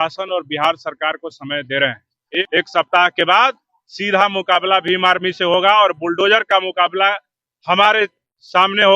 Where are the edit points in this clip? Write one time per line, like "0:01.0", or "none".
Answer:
0:02.4